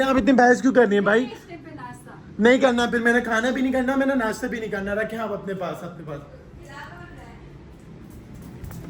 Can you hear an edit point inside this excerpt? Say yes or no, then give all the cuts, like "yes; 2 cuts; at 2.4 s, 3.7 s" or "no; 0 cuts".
no; 0 cuts